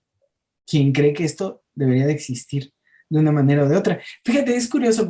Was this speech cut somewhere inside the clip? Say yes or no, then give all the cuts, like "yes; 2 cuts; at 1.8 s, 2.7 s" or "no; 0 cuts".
no; 0 cuts